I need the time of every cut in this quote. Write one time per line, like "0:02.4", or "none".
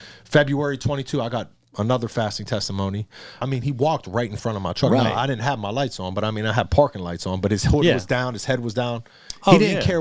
0:03.4